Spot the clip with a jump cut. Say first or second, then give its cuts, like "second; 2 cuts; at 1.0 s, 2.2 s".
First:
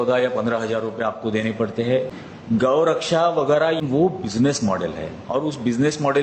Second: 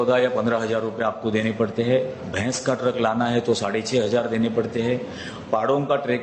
first; 2 cuts; at 2.2 s, 3.8 s